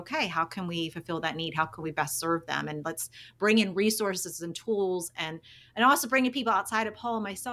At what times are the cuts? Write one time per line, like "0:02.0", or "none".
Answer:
none